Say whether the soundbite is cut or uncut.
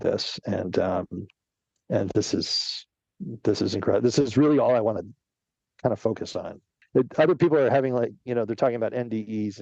cut